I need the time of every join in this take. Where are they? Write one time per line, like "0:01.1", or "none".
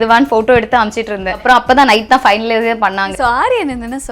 0:01.4
0:03.1